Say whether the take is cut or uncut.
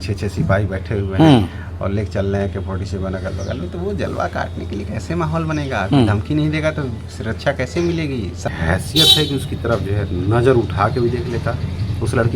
cut